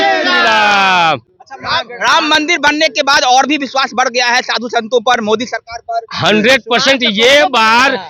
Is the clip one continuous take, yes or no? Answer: yes